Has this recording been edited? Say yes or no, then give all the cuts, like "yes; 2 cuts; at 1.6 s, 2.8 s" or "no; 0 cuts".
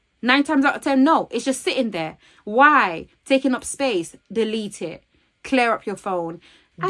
no; 0 cuts